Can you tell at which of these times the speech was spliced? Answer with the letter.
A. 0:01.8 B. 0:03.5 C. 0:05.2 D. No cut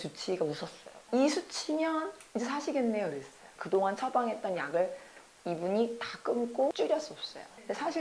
B